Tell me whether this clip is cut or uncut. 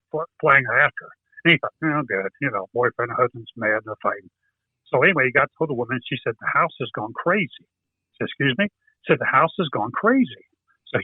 uncut